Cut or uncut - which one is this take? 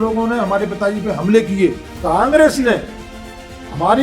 cut